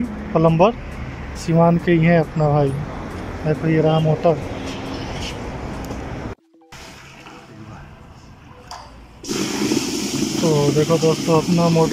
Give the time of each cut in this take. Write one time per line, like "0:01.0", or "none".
0:06.6